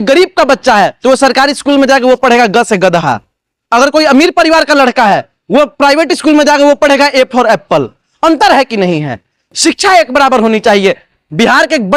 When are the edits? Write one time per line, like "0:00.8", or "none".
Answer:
none

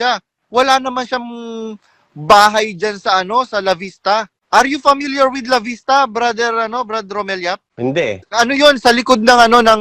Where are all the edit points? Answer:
0:08.0

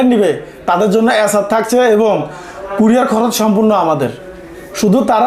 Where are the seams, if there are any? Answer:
none

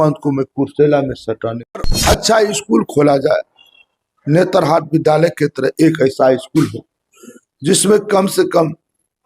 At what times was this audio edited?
0:01.9

